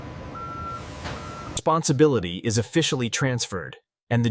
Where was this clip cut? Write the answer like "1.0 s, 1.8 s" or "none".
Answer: 1.5 s

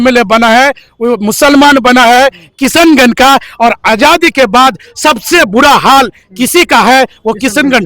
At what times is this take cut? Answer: none

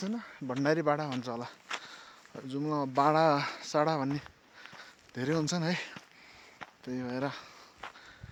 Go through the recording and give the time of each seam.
none

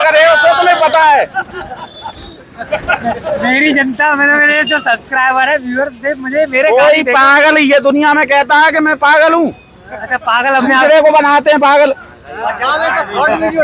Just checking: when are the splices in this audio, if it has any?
none

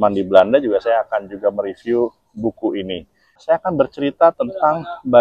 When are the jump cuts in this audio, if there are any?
3.4 s

